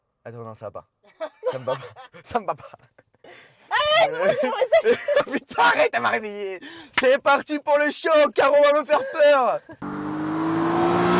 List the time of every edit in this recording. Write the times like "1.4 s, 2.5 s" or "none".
none